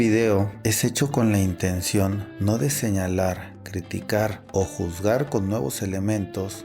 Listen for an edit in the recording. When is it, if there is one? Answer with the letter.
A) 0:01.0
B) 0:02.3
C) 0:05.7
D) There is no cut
B